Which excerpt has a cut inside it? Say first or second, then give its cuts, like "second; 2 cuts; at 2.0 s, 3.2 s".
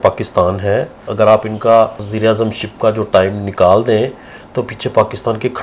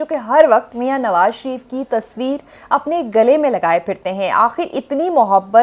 first; 2 cuts; at 1.1 s, 2.0 s